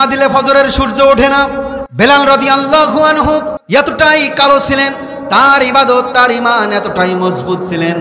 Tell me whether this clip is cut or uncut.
cut